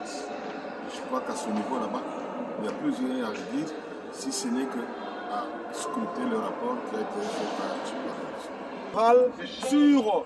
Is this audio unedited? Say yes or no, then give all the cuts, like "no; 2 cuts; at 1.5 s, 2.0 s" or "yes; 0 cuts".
no; 1 cut; at 8.9 s